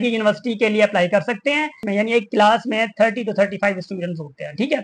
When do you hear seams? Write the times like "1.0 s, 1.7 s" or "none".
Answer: 1.8 s